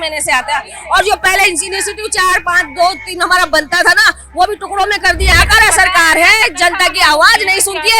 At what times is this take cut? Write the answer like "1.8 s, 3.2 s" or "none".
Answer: 5.3 s